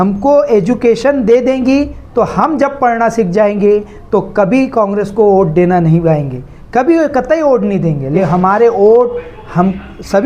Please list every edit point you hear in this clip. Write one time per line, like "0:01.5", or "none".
0:08.2

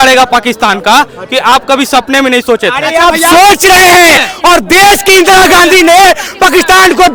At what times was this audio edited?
none

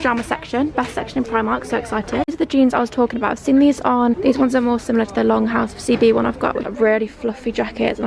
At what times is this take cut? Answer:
0:02.3
0:04.2
0:06.7

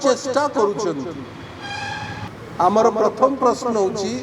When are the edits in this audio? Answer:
0:02.3

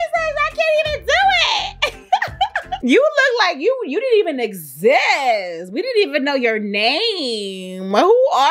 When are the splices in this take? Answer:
none

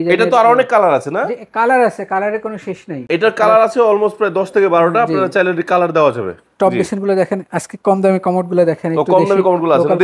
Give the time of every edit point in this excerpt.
none

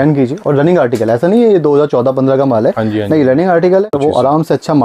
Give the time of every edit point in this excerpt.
0:03.9

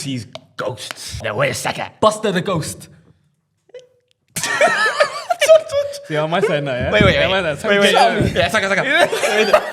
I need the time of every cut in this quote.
0:01.2

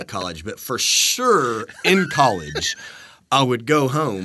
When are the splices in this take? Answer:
none

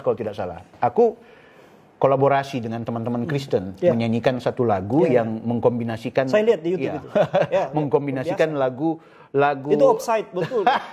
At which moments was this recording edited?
none

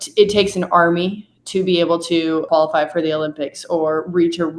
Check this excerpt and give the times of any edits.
0:02.5

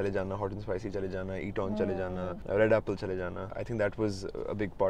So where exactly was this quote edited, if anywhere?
0:02.4
0:03.5

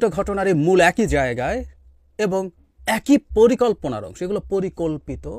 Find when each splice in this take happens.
none

